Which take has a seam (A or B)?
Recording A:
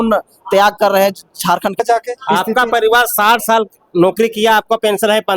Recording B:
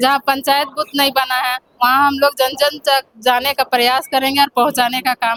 A